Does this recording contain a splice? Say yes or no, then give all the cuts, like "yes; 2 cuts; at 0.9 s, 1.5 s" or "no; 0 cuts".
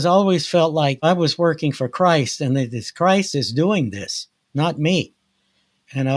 yes; 1 cut; at 1.0 s